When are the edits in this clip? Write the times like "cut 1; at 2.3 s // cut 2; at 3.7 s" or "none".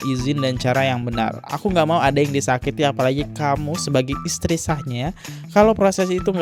none